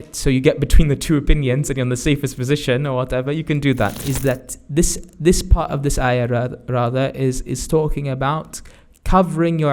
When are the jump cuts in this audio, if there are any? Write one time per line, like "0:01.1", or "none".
0:04.0